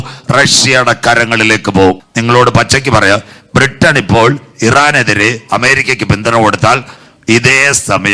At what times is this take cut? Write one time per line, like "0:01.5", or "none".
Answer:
0:02.0
0:07.0